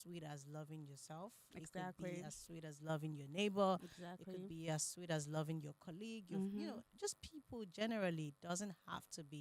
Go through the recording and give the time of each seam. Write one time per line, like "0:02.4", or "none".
none